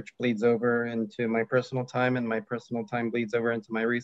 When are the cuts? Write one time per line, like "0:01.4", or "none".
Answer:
none

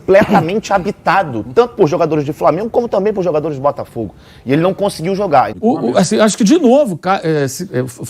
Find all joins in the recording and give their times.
0:05.5

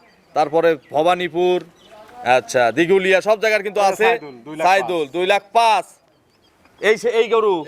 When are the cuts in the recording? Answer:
none

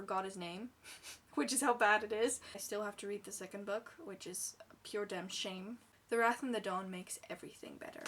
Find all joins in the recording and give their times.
0:02.5
0:05.9

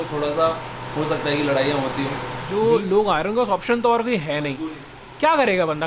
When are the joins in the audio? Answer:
0:02.3

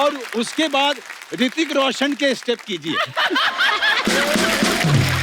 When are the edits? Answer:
0:04.0

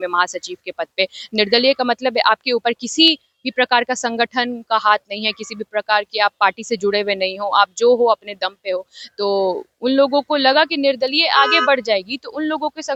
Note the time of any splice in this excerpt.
none

